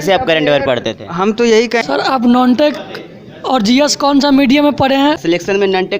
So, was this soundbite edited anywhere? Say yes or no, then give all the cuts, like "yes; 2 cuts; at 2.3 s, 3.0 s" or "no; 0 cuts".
yes; 2 cuts; at 1.8 s, 5.2 s